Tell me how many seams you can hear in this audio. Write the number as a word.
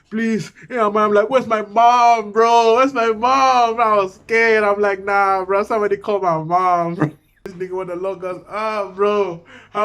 one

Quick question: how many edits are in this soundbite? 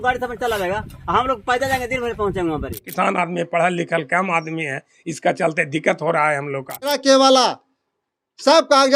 two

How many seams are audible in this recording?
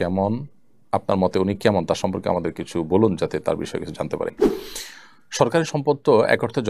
one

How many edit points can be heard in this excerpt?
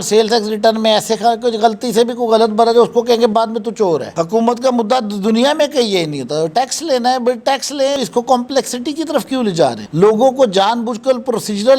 two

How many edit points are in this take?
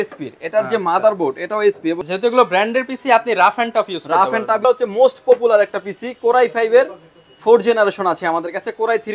two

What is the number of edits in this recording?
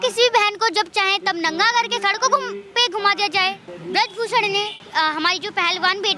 two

